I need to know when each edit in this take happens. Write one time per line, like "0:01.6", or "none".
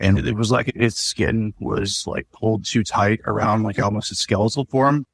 none